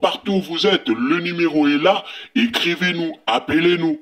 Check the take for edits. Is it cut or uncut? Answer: uncut